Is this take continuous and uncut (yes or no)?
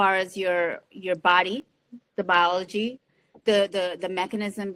yes